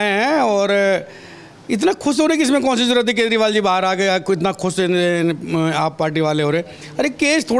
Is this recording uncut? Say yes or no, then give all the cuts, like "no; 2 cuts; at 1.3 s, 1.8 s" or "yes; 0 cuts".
yes; 0 cuts